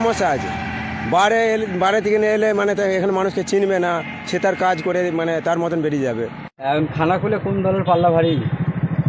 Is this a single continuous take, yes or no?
no